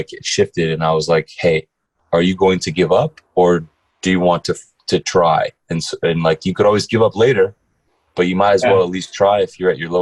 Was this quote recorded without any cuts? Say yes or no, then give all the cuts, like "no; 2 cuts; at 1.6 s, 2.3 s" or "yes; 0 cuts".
yes; 0 cuts